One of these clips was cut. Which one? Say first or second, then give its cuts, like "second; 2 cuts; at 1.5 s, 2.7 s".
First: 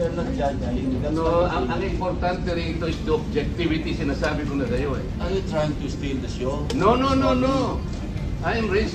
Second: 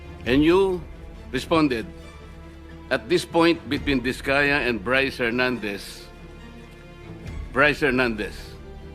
second; 2 cuts; at 5.8 s, 7.5 s